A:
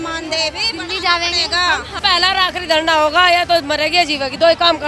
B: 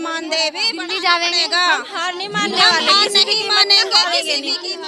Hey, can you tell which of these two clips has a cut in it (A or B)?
A